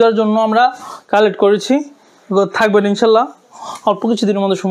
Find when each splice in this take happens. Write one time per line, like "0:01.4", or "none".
none